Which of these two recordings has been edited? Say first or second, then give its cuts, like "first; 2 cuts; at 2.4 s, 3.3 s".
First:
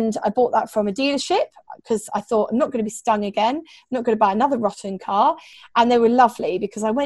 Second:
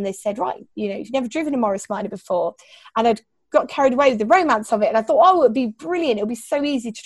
first; 1 cut; at 5.5 s